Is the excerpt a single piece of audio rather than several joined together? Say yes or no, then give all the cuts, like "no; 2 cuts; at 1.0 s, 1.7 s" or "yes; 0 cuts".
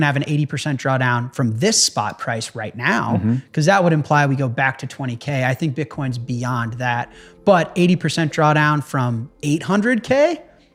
yes; 0 cuts